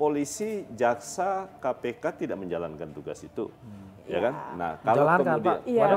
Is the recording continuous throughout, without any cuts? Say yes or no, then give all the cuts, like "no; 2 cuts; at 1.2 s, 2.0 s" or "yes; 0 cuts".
yes; 0 cuts